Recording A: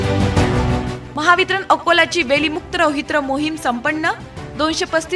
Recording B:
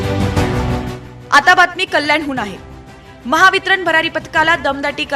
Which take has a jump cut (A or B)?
A